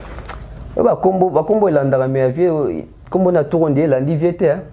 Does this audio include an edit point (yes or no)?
no